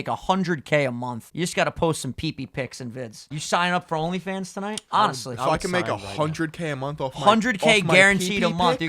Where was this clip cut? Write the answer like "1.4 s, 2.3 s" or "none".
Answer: 1.2 s, 3.3 s, 4.8 s